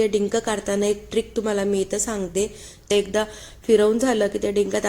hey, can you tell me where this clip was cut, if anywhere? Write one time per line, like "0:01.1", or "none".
0:02.9